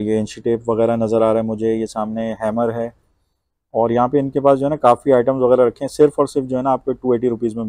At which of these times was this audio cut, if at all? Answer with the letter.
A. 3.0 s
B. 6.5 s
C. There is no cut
C